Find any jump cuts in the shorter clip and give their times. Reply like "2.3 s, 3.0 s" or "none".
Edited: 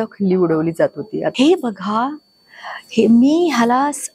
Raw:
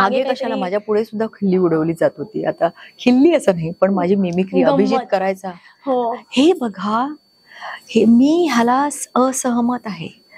1.3 s

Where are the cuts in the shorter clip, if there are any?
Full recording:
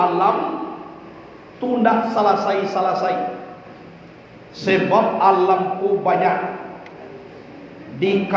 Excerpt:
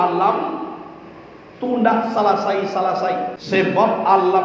3.4 s

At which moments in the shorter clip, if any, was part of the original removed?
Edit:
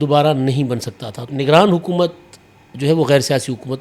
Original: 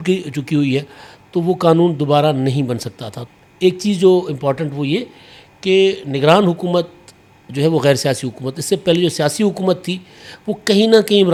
1.3 s

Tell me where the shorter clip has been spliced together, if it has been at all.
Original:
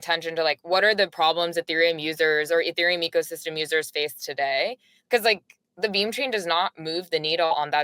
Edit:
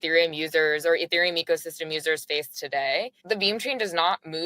3.1 s

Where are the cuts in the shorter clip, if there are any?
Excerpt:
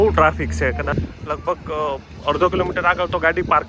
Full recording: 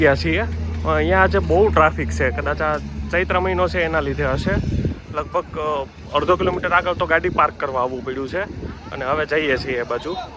0.9 s

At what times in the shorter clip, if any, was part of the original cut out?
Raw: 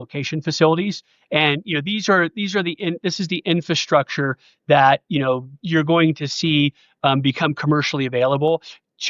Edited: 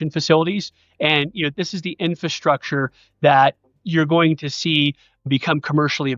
1.5 s, 3.6 s, 5.2 s

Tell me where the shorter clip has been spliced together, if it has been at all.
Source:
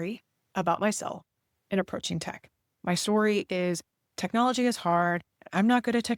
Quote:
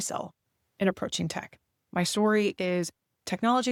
none

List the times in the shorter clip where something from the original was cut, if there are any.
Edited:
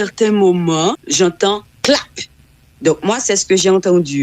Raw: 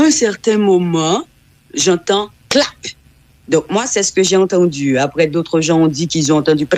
1.0 s

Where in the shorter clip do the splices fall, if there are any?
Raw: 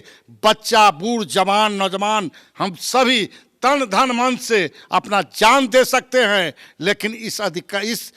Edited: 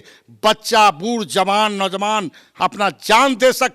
2.4 s

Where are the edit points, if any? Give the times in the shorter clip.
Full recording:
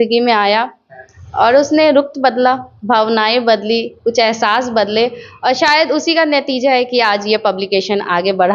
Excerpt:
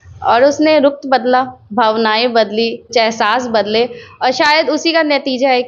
2.9 s

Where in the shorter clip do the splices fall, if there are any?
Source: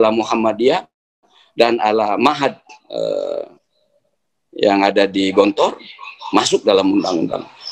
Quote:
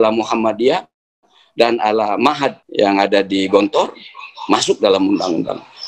2.6 s

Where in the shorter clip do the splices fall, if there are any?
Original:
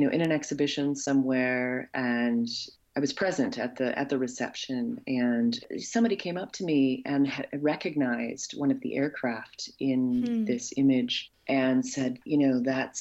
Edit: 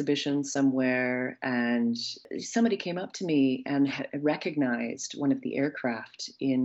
2.3 s

